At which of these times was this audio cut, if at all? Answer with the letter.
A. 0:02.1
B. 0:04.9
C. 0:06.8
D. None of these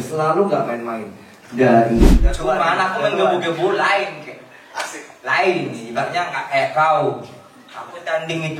A